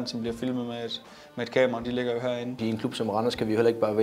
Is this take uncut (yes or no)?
no